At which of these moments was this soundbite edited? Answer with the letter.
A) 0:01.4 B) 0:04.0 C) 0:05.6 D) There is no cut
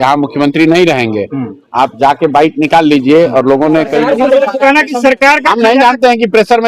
B